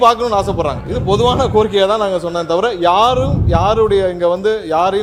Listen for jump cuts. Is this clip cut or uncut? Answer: uncut